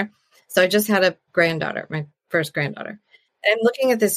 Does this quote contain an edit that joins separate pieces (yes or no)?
yes